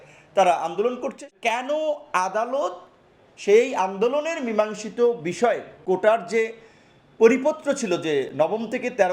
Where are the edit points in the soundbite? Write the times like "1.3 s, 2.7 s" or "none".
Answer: 1.3 s, 5.7 s

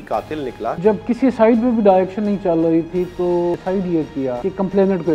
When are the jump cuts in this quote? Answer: 0.8 s, 3.6 s, 4.4 s

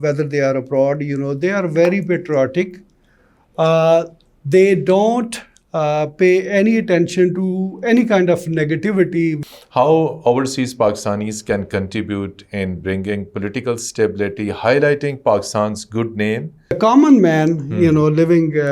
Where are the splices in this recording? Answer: 9.4 s, 16.8 s

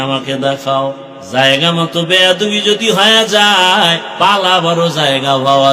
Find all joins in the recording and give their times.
1.1 s, 4.0 s

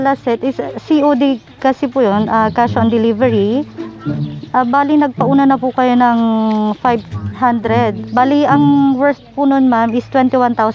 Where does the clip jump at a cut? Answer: 8.0 s

